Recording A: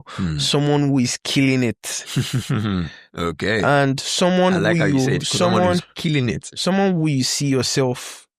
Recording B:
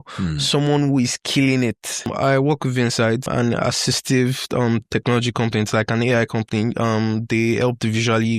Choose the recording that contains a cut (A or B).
B